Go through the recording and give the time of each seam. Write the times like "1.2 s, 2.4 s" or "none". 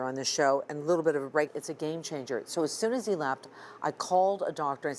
1.5 s